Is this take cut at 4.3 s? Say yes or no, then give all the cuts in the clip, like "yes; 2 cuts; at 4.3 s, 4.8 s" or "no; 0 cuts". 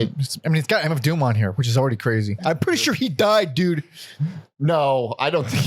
no; 1 cut; at 2.3 s